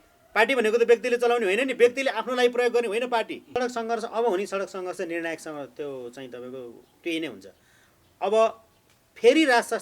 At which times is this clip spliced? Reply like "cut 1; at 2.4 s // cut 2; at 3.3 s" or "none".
cut 1; at 3.5 s